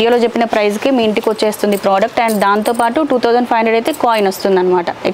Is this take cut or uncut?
uncut